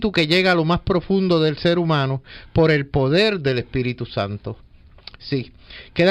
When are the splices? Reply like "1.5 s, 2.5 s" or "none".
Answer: none

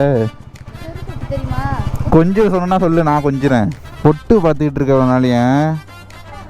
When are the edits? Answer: 3.8 s

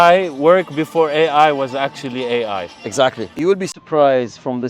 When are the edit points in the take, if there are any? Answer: 3.3 s

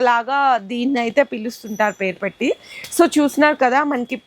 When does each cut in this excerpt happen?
none

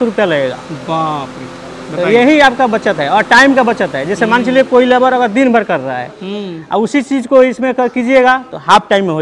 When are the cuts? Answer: none

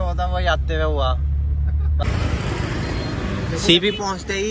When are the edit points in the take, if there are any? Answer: 1.7 s

